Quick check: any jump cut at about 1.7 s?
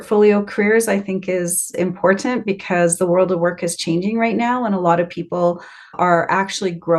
yes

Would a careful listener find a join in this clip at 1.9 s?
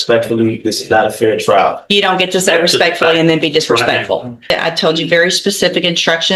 no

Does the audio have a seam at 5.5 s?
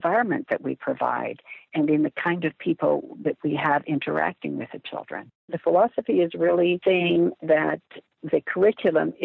yes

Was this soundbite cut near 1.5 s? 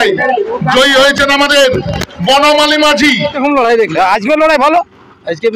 no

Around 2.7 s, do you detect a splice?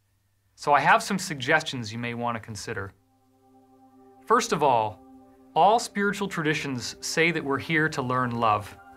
no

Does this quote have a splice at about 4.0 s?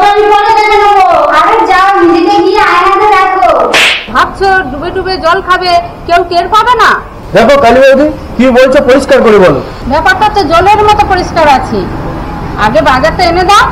yes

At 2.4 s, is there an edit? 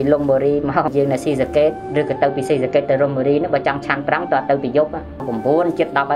no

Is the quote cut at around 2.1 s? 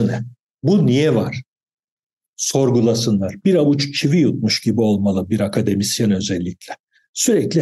no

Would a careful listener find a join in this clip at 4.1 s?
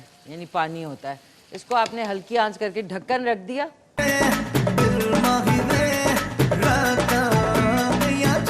yes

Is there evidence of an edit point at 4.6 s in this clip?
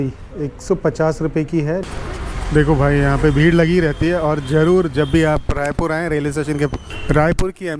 no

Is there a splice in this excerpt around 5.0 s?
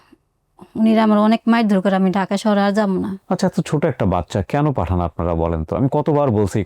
no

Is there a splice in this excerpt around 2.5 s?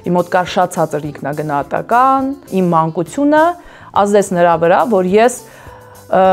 yes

